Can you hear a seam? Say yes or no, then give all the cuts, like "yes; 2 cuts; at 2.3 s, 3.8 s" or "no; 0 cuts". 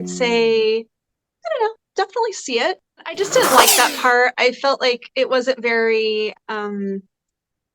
yes; 1 cut; at 3.1 s